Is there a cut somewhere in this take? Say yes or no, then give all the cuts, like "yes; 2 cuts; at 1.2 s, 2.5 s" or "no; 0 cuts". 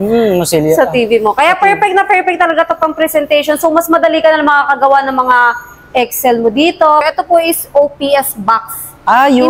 yes; 1 cut; at 7.1 s